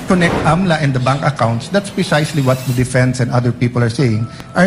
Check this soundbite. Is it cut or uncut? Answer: uncut